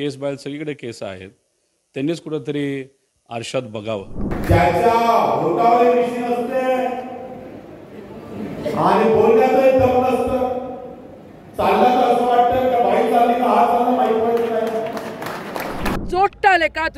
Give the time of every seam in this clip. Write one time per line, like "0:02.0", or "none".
0:04.3
0:15.9